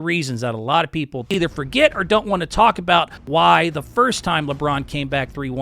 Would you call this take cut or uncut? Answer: cut